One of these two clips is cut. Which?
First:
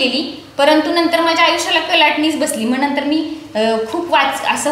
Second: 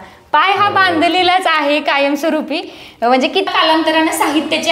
second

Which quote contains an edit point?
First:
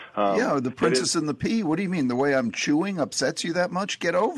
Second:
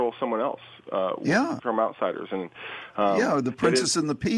second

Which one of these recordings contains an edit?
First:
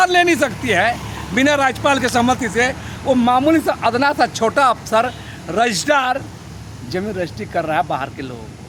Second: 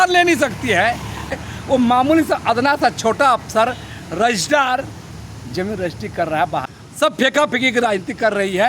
second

